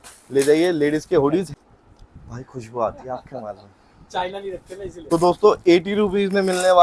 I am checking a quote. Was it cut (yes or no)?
yes